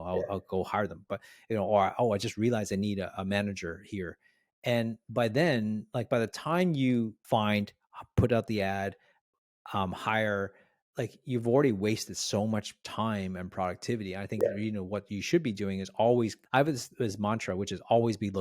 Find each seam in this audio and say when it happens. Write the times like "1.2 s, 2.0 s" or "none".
16.4 s